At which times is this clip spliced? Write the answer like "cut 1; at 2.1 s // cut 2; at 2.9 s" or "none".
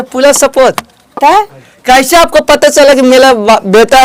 none